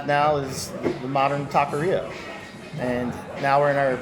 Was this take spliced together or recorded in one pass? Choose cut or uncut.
uncut